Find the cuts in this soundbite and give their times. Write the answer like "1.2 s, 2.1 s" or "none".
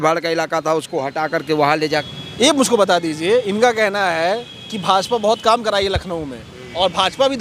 2.2 s

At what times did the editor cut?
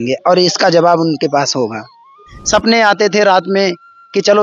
2.3 s

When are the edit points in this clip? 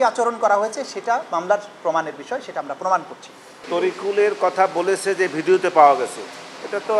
3.6 s

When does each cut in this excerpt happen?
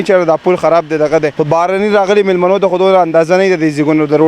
1.3 s

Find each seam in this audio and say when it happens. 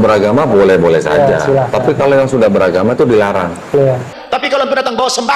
4.2 s

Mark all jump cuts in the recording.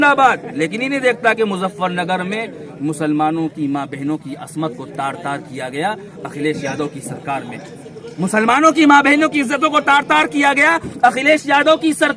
none

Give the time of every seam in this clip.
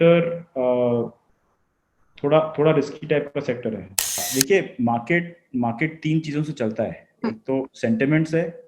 4.2 s

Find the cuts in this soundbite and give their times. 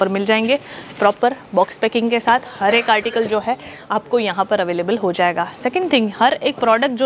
none

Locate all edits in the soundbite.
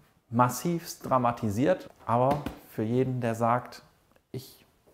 1.9 s

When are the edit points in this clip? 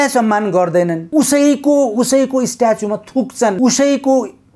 1.0 s, 3.6 s

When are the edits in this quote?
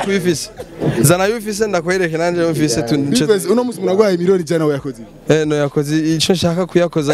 none

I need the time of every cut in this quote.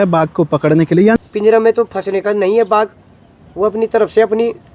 1.2 s

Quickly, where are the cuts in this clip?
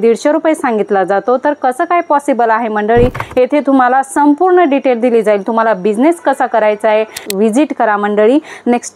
3.2 s, 7.2 s

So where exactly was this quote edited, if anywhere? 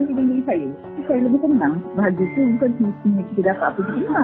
1.0 s, 1.8 s

